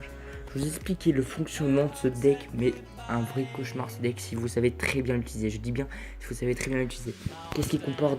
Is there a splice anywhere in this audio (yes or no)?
yes